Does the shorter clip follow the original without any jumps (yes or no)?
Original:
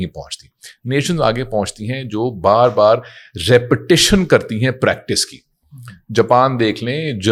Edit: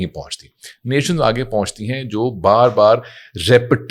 yes